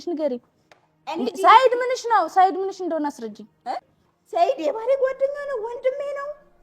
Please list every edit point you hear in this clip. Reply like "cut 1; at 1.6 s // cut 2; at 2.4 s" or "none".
cut 1; at 3.9 s